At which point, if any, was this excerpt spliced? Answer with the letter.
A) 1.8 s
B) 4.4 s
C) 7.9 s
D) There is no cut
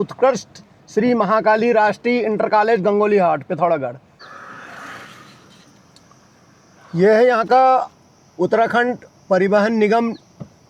B